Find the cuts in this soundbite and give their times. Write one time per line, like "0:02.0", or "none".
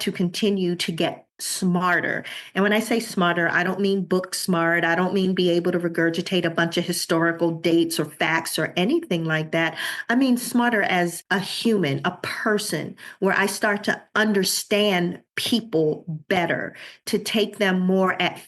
0:11.2
0:14.0

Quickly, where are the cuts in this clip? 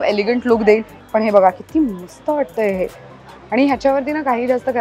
0:00.9

